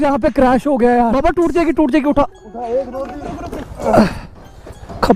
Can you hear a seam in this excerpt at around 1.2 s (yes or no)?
yes